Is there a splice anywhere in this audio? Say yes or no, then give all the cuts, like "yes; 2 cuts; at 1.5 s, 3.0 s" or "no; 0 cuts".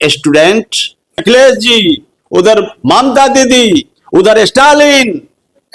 yes; 1 cut; at 1.2 s